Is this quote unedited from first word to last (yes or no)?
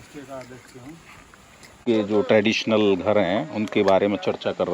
no